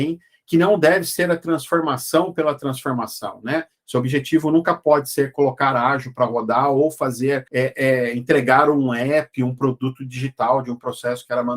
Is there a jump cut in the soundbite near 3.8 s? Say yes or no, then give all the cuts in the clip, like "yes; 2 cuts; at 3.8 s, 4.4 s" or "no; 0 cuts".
no; 1 cut; at 7.5 s